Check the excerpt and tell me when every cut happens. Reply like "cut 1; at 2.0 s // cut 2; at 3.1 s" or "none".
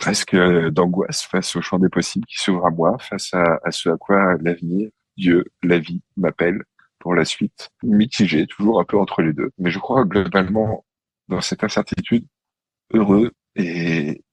cut 1; at 7.8 s // cut 2; at 9.5 s